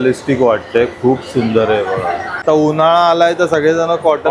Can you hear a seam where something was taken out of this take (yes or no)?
yes